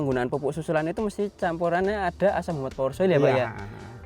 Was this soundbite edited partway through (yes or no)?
no